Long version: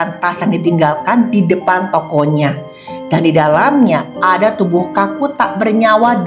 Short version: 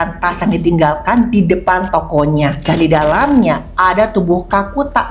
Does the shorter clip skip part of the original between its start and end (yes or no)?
yes